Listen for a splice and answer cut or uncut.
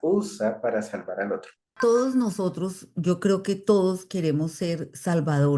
cut